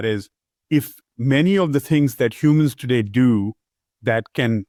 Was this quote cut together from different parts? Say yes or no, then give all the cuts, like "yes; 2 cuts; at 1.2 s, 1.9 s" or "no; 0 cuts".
no; 0 cuts